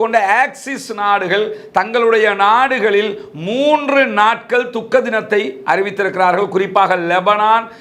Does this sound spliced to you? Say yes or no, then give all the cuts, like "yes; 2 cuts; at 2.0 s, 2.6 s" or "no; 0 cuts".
no; 0 cuts